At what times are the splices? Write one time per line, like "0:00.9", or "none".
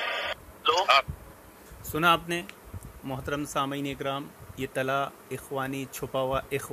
none